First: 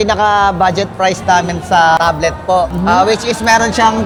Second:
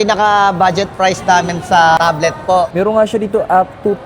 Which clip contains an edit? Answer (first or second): second